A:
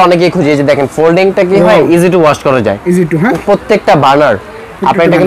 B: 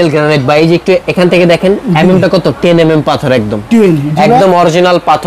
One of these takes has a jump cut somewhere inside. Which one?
A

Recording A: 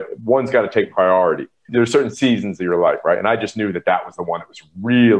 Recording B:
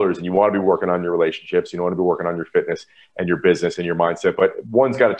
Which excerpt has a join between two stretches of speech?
A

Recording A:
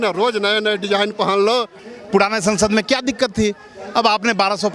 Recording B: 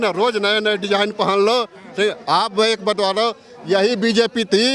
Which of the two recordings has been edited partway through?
A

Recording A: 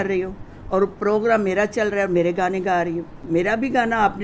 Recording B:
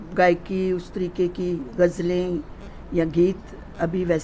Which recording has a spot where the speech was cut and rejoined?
A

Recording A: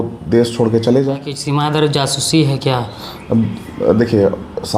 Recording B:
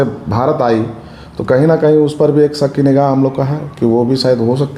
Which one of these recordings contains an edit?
A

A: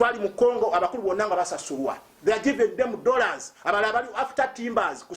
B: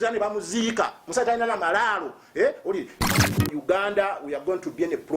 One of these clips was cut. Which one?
B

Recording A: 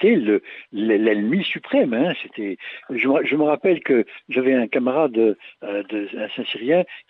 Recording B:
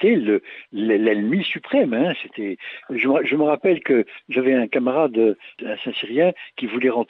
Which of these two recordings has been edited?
B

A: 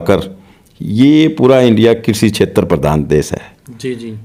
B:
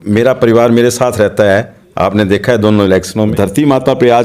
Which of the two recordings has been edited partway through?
B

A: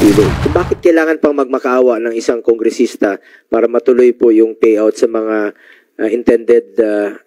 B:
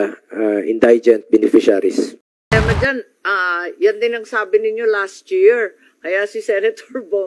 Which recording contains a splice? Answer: B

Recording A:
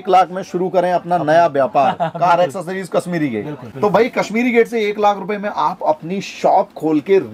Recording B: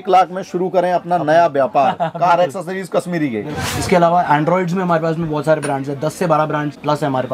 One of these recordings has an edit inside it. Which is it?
B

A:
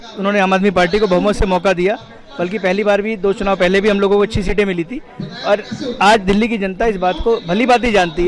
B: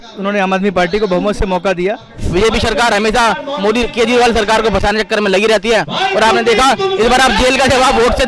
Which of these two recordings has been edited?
B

